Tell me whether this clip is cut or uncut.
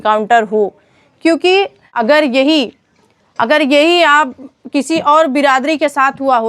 cut